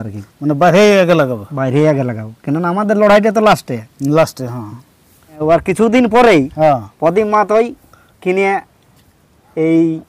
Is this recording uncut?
no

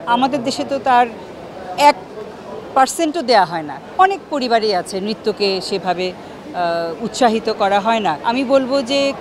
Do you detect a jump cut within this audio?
yes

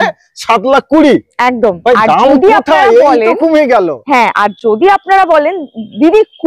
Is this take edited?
no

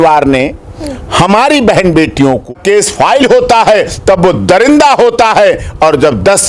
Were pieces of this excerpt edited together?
yes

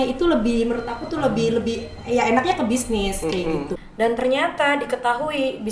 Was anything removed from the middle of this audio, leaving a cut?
yes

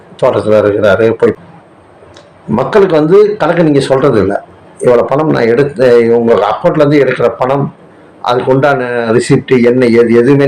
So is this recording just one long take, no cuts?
no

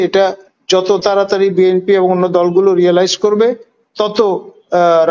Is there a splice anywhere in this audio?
no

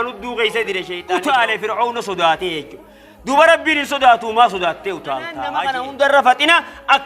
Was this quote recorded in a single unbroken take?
no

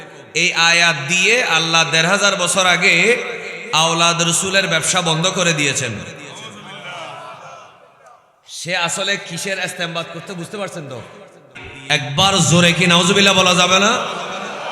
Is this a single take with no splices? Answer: no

